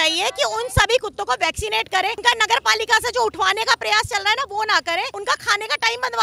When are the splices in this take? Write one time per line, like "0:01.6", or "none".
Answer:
0:02.2
0:05.1